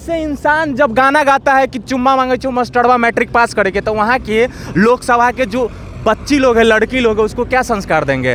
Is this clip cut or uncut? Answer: uncut